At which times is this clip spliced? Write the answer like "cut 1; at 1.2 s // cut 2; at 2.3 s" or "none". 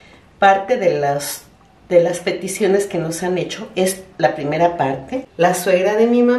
cut 1; at 5.2 s